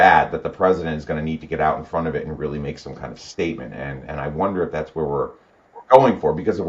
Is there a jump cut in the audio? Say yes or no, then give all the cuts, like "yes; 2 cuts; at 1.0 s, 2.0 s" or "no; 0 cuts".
no; 0 cuts